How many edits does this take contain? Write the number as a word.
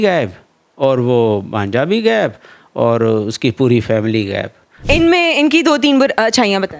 one